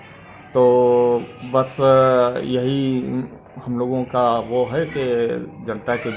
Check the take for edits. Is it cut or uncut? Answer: uncut